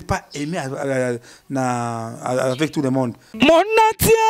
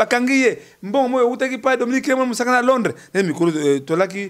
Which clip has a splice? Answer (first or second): first